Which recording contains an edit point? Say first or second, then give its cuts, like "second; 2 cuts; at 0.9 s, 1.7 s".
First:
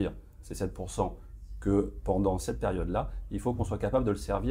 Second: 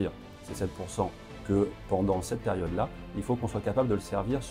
second; 1 cut; at 1.3 s